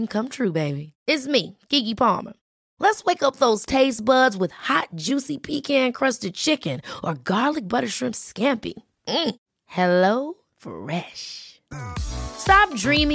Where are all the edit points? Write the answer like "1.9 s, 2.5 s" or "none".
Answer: none